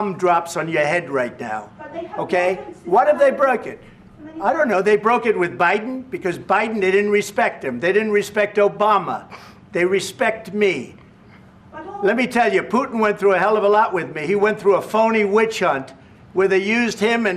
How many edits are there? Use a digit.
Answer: 1